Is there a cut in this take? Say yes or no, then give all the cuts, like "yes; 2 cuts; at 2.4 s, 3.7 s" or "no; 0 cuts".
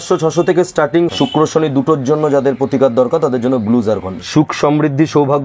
yes; 2 cuts; at 1.1 s, 4.1 s